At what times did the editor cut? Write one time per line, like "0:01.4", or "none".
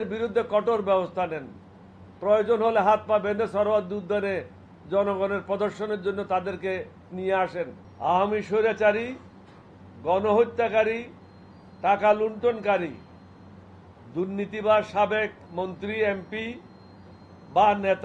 0:07.8

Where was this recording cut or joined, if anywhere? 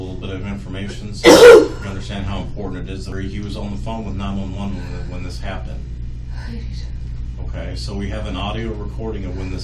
0:03.1

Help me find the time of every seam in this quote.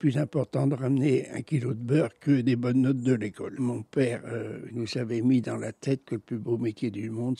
0:03.5
0:04.7

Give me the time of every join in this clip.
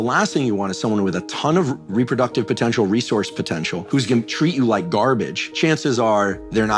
0:03.9
0:05.4

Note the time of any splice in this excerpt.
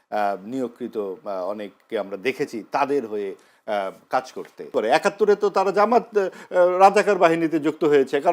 0:04.7

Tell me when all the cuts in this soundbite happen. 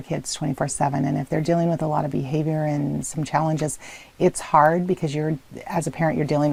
none

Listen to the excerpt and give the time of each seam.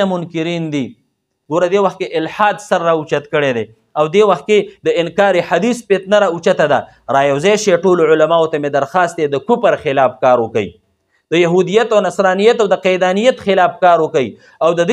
0:01.3

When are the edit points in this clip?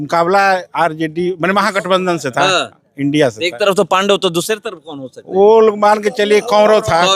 none

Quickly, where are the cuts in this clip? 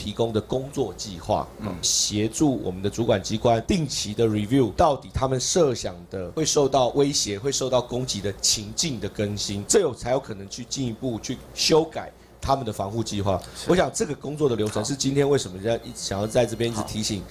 none

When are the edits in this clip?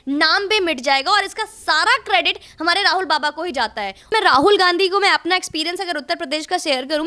0:04.1

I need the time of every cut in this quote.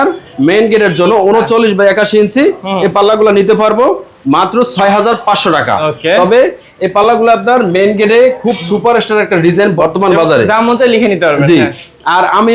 none

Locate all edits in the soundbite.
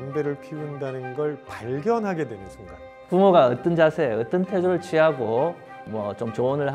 0:02.9
0:05.8

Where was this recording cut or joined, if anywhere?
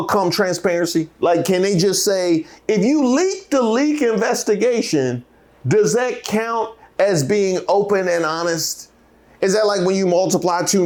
none

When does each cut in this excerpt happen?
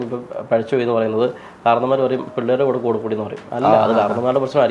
none

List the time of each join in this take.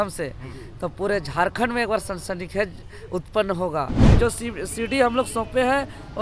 0:04.0

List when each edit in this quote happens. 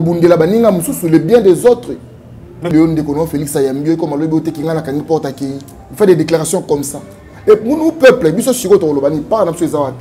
0:02.7

